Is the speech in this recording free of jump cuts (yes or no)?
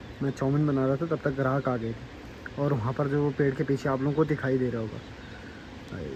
yes